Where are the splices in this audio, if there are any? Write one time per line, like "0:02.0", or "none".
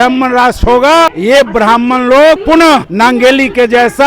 0:01.2
0:02.5